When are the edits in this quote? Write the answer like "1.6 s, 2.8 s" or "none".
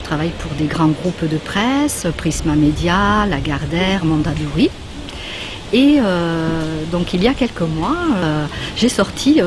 8.2 s